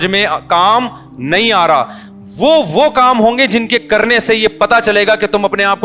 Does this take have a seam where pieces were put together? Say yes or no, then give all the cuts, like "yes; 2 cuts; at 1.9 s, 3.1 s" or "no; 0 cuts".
no; 0 cuts